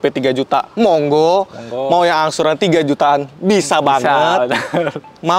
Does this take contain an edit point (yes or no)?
no